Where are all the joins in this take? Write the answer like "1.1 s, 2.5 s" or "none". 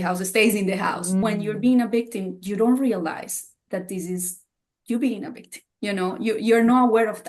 1.2 s